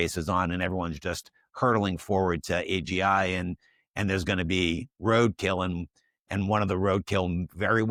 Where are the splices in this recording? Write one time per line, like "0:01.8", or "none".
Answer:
none